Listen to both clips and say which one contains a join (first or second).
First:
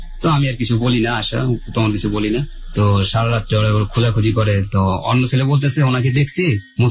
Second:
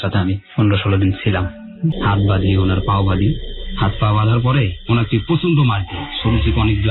second